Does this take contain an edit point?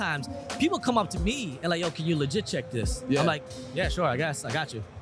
no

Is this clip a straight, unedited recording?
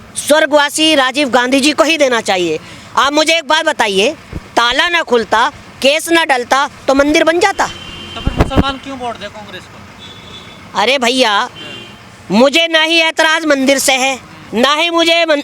yes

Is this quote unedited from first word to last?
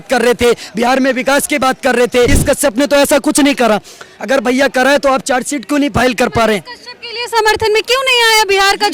no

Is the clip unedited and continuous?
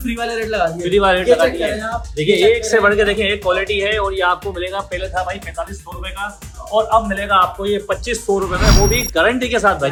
yes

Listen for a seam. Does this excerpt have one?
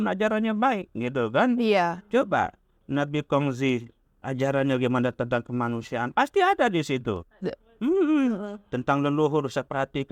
no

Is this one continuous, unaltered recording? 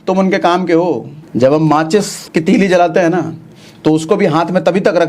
no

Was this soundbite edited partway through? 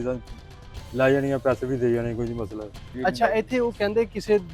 yes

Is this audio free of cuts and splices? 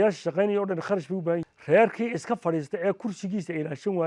no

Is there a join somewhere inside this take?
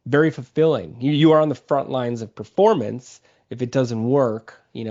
no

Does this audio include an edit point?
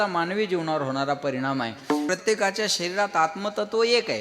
yes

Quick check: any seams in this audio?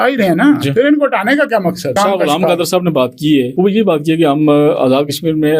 yes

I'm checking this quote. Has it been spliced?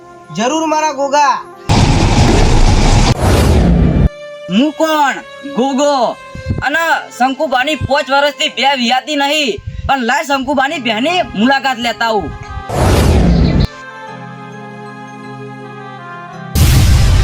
yes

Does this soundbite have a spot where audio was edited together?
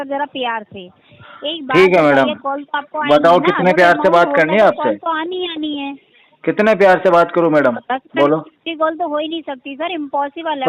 no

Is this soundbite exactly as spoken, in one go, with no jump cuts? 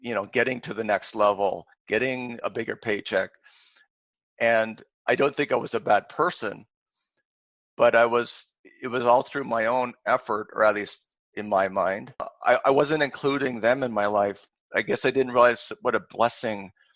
no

